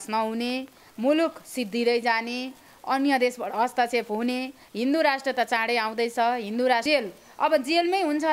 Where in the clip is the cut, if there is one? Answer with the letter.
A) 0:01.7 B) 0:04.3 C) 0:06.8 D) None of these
C